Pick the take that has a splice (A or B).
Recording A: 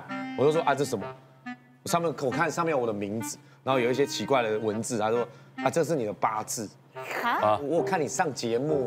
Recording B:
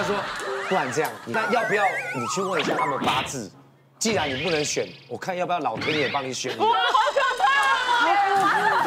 B